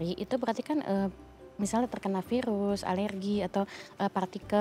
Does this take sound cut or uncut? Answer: uncut